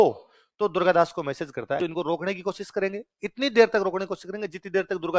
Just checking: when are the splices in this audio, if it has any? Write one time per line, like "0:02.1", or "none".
0:01.8